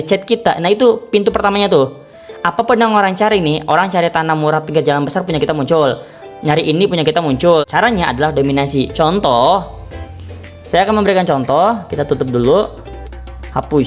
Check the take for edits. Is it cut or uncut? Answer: cut